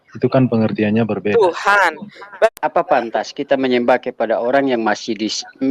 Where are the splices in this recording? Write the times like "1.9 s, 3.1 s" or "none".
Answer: 2.5 s